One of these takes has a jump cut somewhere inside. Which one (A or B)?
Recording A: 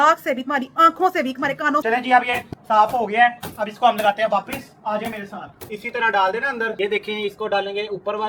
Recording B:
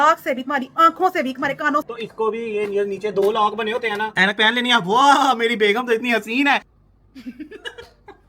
B